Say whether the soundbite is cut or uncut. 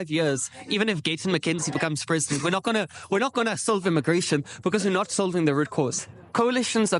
cut